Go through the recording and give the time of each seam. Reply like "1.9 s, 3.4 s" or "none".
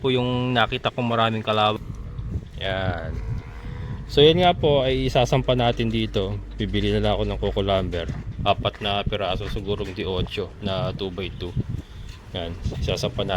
1.8 s